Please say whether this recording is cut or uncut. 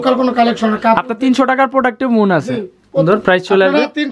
cut